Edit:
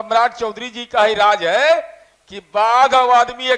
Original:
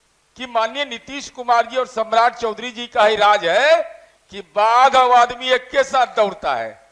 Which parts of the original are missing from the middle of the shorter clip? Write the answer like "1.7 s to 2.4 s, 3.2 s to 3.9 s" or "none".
none